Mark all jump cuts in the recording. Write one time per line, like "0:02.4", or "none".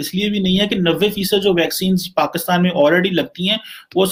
none